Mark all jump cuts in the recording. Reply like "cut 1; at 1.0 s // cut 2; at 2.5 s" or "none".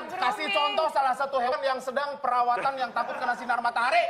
cut 1; at 1.5 s